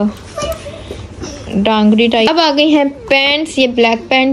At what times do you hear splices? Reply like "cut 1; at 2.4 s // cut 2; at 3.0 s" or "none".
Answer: cut 1; at 2.3 s